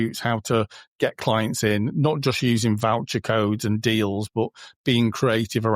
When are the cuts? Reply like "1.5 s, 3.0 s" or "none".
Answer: none